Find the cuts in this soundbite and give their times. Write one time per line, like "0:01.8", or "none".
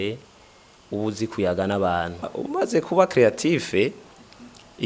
0:02.4